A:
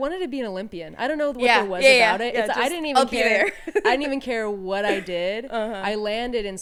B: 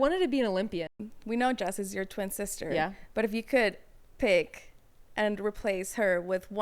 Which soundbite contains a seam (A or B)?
B